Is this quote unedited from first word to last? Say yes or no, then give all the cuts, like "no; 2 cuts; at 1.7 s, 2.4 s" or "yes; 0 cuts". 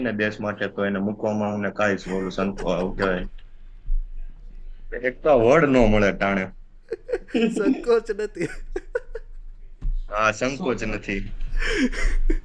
yes; 0 cuts